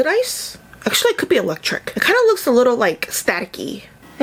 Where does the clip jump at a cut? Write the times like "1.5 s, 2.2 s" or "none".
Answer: none